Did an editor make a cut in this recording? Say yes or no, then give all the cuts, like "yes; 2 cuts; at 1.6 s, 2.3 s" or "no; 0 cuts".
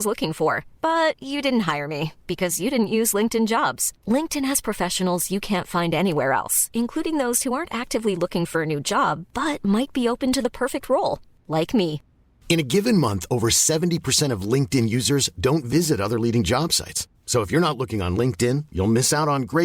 no; 0 cuts